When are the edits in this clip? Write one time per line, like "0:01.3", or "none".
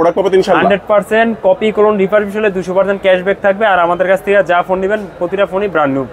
none

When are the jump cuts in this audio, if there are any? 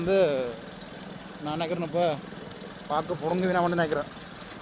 none

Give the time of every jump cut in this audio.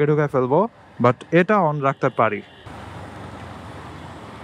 0:02.6

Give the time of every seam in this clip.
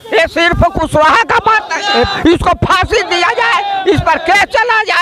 0:02.1

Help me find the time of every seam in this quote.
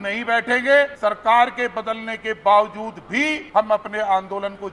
0:00.9
0:03.4

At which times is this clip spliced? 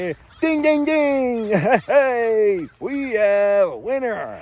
none

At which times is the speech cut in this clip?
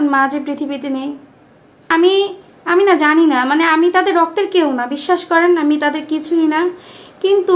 none

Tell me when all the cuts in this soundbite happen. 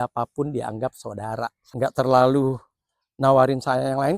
0:01.6

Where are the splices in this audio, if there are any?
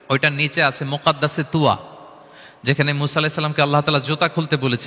none

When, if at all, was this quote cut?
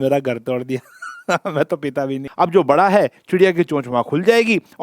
0:02.2

